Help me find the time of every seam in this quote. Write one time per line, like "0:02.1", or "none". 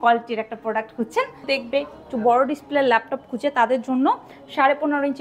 0:01.4